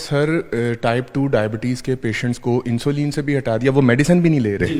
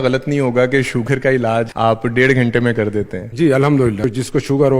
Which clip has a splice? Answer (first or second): second